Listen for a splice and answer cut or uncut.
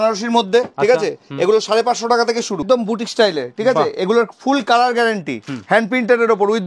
cut